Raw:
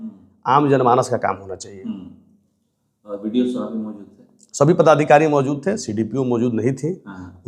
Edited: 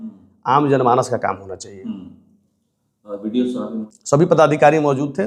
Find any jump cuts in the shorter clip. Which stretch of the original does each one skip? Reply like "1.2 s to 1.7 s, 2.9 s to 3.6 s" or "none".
3.9 s to 4.4 s